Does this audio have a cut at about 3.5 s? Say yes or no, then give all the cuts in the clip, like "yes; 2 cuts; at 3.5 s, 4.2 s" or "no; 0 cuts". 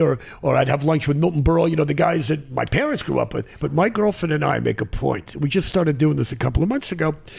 yes; 1 cut; at 3.5 s